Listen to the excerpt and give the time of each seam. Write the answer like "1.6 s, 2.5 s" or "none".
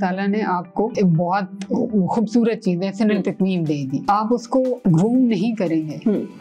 0.9 s, 4.2 s